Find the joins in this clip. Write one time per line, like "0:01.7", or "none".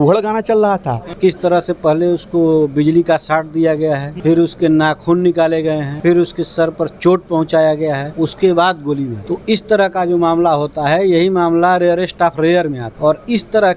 0:01.1
0:04.1
0:05.9
0:08.1
0:09.2
0:12.8